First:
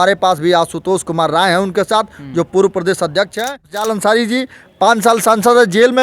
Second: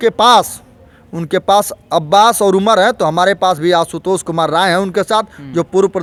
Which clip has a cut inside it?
first; 1 cut; at 3.7 s

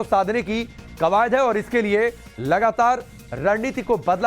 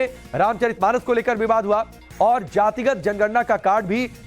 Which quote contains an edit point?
first; 1 cut; at 1.1 s

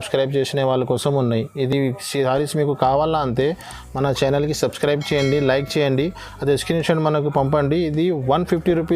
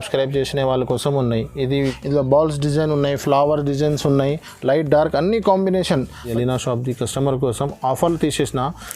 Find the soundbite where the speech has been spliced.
second; 2 cuts; at 1.7 s, 6.3 s

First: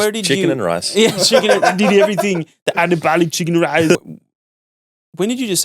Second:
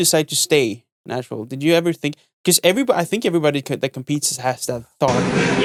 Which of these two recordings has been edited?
first; 1 cut; at 4.0 s

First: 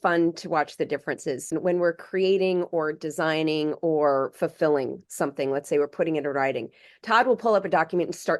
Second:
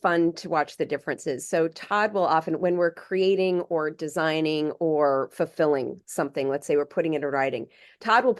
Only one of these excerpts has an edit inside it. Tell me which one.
first; 1 cut; at 1.5 s

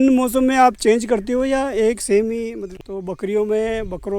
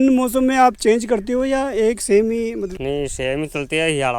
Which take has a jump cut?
first; 1 cut; at 2.7 s

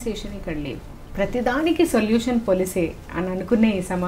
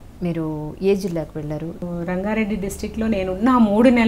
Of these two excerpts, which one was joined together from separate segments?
second; 1 cut; at 1.8 s

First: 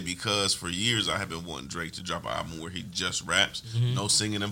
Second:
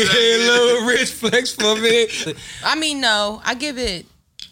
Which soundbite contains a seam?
second; 1 cut; at 2.2 s

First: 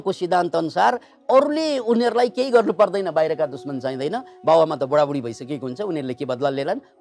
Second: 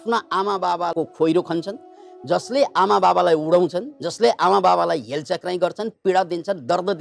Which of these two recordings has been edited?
second; 1 cut; at 0.9 s

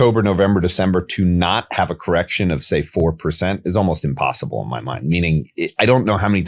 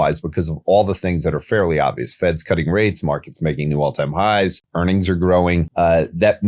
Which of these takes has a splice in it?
second; 2 cuts; at 4.6 s, 5.7 s

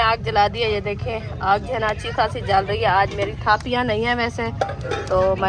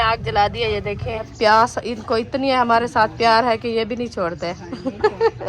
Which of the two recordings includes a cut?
second; 1 cut; at 1.3 s

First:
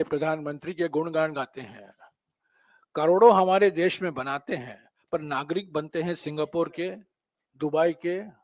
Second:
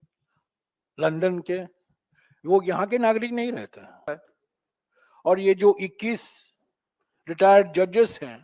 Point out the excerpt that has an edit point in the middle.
second; 1 cut; at 4.1 s

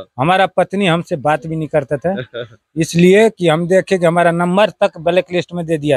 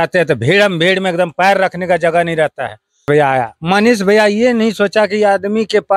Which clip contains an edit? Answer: second; 1 cut; at 3.0 s

